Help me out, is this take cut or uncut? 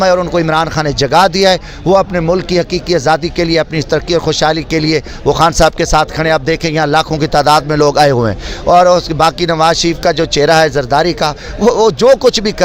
uncut